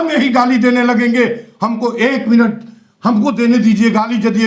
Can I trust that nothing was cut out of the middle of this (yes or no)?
yes